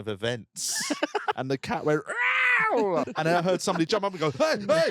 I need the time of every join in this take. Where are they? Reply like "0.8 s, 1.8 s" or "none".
1.4 s, 3.0 s